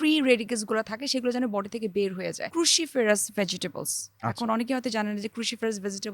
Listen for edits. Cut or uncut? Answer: cut